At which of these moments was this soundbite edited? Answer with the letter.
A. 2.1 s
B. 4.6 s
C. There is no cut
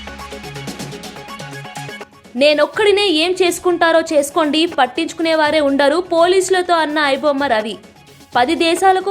A